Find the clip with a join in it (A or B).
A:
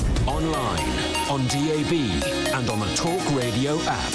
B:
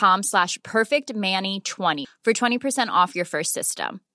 B